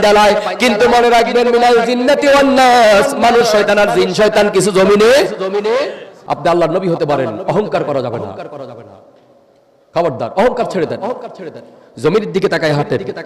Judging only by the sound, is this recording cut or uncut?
cut